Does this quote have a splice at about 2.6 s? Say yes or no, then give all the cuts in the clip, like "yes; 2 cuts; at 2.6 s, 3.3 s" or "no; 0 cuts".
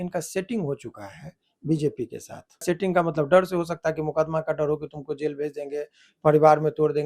yes; 1 cut; at 2.6 s